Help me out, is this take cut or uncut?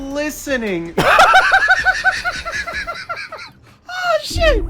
uncut